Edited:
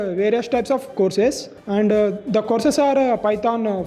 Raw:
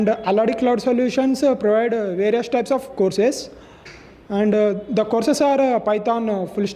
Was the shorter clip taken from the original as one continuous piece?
no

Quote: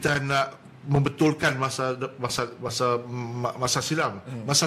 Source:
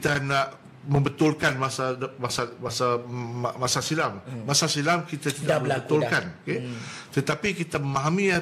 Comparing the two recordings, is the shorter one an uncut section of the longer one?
yes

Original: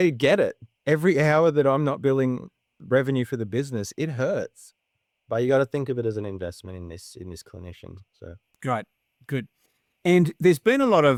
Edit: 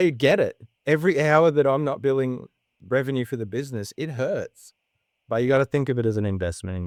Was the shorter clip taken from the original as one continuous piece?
yes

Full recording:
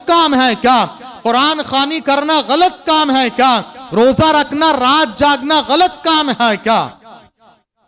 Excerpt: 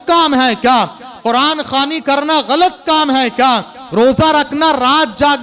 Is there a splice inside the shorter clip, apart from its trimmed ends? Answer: no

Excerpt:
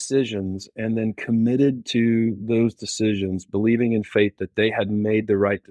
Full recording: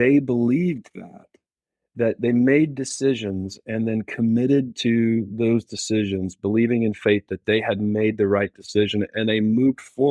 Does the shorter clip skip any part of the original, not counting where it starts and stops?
no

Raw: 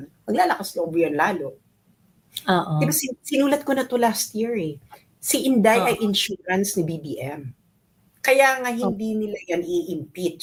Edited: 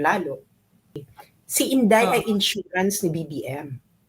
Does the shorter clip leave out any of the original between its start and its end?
yes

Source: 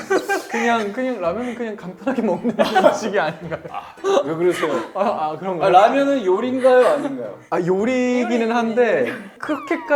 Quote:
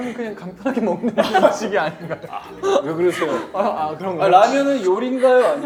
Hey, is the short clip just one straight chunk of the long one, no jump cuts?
yes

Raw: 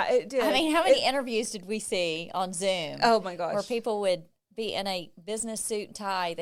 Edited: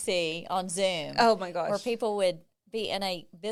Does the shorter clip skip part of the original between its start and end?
no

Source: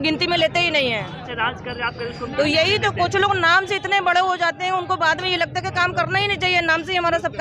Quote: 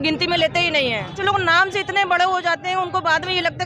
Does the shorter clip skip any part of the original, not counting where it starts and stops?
yes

